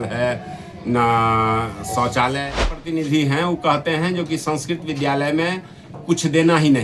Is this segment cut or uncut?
cut